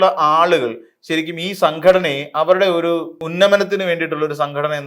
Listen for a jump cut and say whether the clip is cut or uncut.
cut